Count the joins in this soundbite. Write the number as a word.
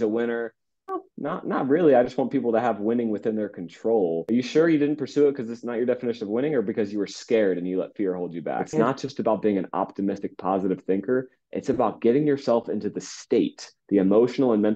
three